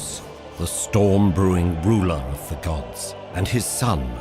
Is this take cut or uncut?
cut